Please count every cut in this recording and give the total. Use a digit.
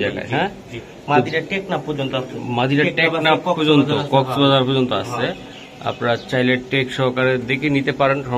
0